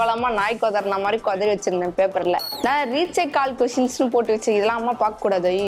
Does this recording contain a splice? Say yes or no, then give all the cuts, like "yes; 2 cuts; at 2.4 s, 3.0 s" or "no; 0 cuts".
yes; 1 cut; at 2.5 s